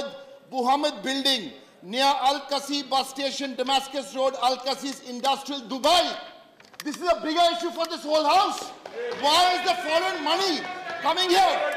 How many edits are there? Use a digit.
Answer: 1